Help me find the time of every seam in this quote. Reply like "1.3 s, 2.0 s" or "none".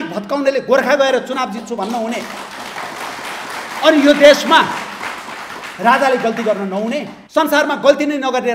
7.1 s